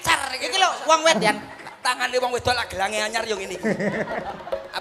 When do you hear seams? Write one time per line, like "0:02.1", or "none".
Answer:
0:01.2